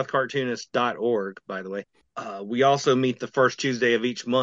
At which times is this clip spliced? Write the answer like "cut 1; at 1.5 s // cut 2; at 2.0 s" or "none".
cut 1; at 2.0 s